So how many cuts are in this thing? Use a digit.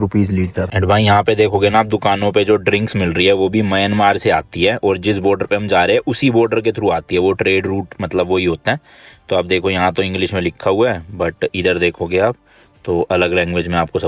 0